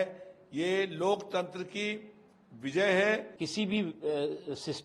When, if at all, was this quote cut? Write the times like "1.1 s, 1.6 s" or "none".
3.4 s